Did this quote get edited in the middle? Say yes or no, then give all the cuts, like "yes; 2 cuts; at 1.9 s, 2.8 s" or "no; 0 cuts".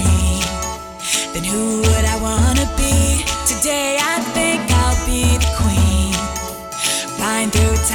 no; 0 cuts